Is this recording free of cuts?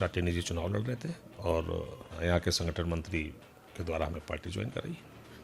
no; 1 cut; at 2.0 s

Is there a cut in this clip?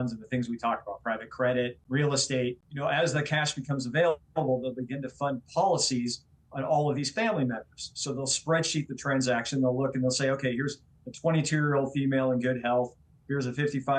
yes; 2 cuts; at 1.8 s, 2.7 s

